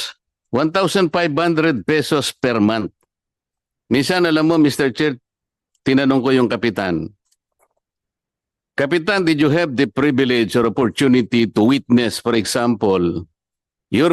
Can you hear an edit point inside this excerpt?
no; 0 cuts

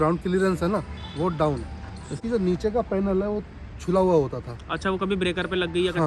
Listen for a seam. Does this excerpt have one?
yes; 1 cut; at 2.2 s

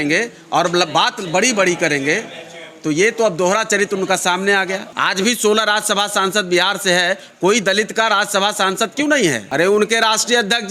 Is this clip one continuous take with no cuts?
no; 2 cuts; at 4.9 s, 9.4 s

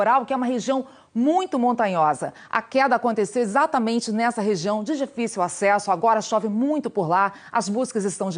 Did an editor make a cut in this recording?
no; 0 cuts

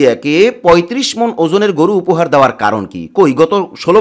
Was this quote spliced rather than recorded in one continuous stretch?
no; 0 cuts

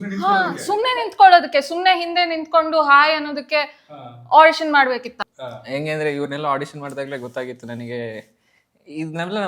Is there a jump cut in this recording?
yes; 1 cut; at 5.2 s

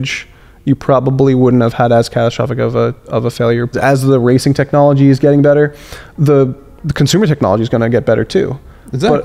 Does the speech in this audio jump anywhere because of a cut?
yes; 1 cut; at 3.7 s

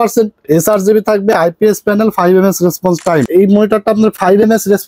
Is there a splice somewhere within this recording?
yes; 1 cut; at 3.3 s

